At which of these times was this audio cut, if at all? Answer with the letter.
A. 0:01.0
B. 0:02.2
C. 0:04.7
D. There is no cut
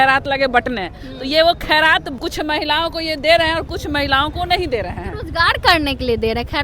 B